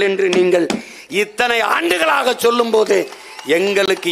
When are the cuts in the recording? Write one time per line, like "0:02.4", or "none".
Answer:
none